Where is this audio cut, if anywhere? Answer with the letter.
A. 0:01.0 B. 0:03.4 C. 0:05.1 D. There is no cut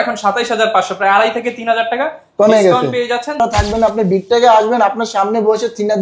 B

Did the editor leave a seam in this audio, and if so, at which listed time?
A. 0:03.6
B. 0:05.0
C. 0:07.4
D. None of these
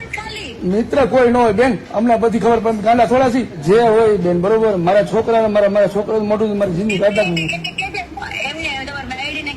A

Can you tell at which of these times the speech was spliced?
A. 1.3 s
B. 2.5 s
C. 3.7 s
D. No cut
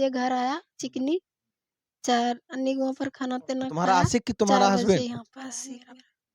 C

